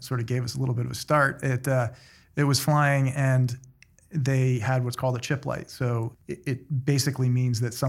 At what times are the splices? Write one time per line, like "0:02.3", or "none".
0:06.1